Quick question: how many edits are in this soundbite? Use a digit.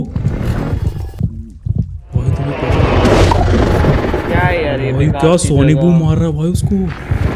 1